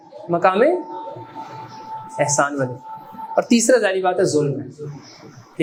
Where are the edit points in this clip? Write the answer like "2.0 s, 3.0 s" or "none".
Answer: none